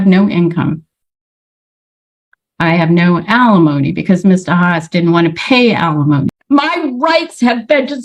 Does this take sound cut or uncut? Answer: cut